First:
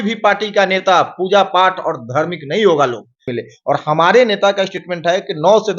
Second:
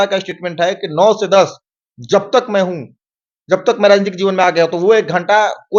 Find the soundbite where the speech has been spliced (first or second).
first